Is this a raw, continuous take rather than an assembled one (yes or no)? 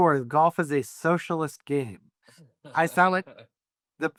yes